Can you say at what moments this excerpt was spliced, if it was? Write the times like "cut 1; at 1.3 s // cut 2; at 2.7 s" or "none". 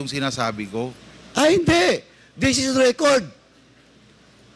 cut 1; at 1.6 s

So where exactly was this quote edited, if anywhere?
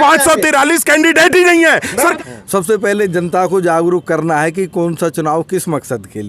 cut 1; at 2.1 s

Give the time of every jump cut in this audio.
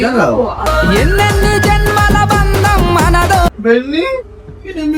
cut 1; at 3.5 s

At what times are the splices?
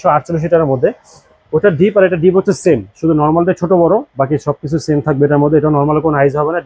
none

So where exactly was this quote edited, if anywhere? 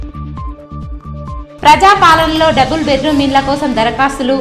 cut 1; at 1.0 s

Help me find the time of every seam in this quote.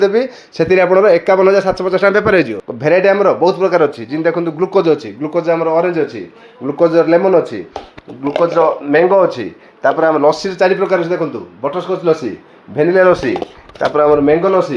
cut 1; at 2.6 s

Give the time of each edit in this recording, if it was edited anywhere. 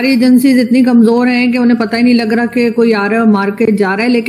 none

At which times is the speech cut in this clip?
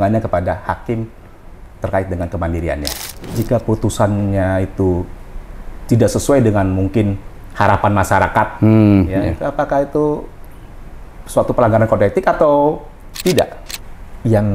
cut 1; at 3.4 s // cut 2; at 13.6 s

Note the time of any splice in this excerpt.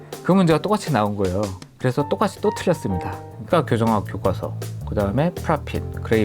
cut 1; at 3.4 s

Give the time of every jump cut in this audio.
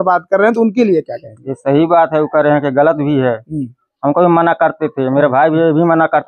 none

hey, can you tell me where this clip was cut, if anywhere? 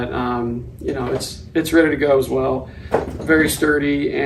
none

